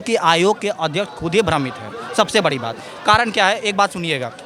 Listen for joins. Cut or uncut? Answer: uncut